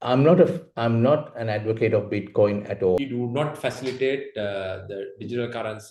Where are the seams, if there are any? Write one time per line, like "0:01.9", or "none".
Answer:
0:03.0